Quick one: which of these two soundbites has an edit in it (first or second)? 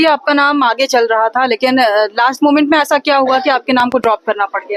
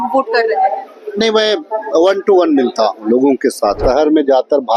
second